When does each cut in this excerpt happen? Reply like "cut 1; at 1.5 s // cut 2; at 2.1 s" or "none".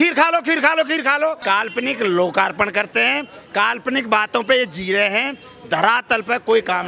cut 1; at 1.4 s